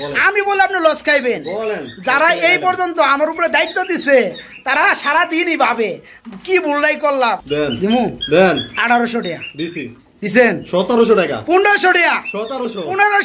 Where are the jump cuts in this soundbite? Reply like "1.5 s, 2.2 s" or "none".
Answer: 7.4 s